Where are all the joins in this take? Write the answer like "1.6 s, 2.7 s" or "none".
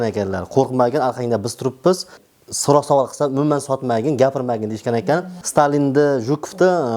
2.2 s, 5.4 s